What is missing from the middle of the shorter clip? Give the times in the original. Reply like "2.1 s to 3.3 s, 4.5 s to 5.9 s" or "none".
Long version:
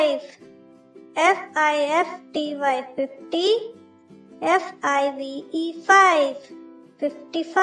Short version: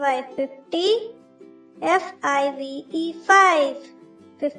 none